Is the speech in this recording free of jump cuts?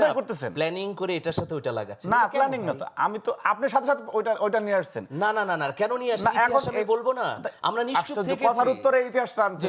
yes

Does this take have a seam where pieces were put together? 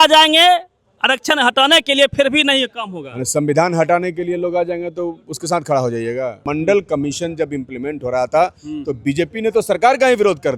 yes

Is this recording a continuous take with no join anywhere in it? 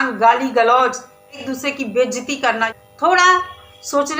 no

